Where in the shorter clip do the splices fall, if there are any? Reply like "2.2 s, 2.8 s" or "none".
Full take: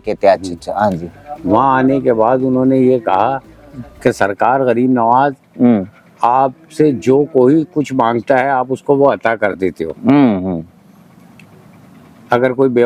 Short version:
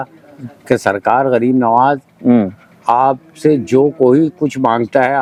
none